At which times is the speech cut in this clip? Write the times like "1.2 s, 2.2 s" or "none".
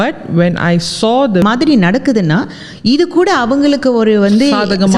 1.4 s